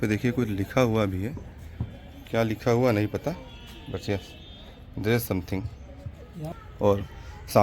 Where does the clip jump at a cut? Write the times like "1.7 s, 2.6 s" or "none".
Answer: 6.4 s